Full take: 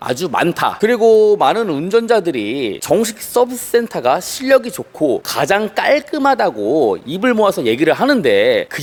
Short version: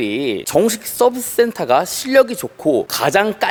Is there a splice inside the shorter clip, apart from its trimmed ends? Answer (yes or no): no